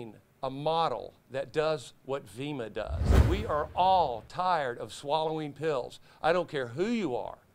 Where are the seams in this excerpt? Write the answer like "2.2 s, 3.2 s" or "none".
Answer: 3.1 s